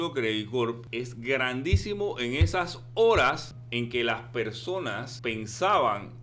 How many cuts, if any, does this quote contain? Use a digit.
3